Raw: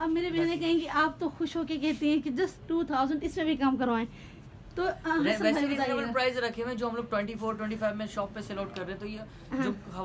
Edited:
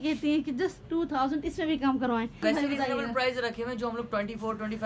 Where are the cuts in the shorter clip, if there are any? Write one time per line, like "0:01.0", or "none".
0:02.4